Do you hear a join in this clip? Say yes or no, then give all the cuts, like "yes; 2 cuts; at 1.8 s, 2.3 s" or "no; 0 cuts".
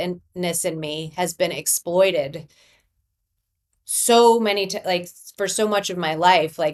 no; 0 cuts